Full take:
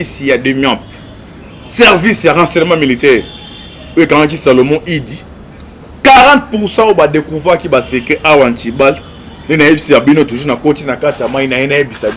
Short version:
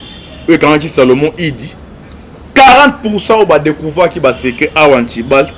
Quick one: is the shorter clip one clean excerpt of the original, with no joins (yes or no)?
yes